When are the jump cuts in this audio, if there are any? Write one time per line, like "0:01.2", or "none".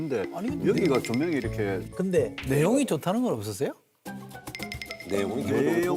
none